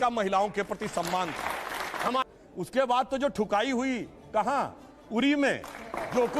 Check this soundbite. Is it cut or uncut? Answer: cut